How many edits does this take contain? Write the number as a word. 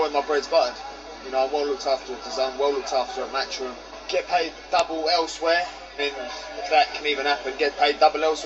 two